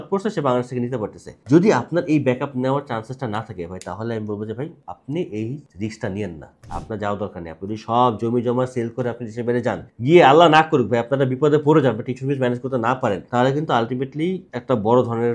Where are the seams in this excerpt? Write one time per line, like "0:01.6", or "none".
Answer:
none

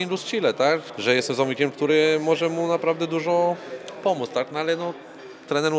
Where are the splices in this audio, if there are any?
none

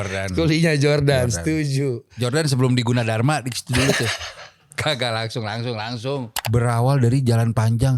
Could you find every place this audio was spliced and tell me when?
0:06.3

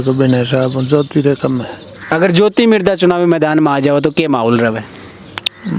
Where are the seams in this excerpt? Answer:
none

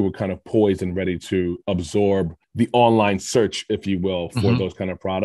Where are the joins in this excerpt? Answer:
0:02.3

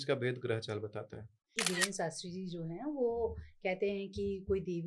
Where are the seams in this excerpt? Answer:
0:01.6

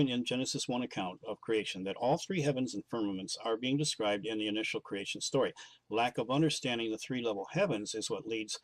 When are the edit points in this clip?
0:06.1

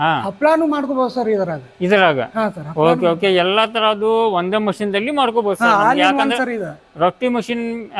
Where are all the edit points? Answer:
none

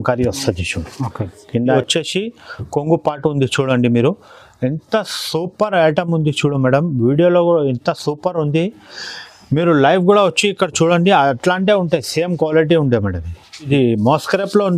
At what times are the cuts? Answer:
0:01.7
0:13.7

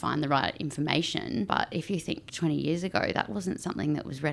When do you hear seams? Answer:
0:01.5

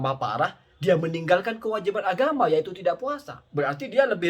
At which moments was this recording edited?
none

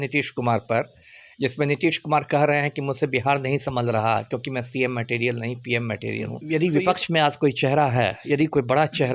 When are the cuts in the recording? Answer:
0:06.4

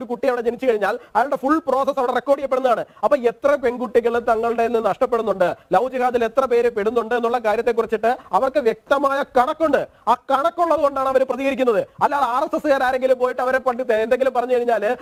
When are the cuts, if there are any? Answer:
none

